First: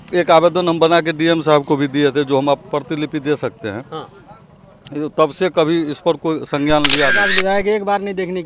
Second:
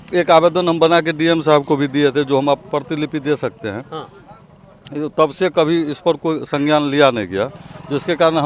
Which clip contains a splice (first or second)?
first